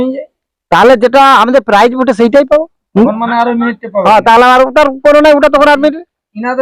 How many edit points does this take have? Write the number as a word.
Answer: zero